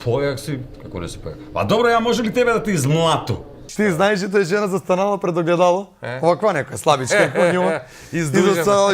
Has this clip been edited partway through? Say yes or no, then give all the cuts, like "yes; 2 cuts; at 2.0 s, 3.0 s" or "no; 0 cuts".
yes; 1 cut; at 3.6 s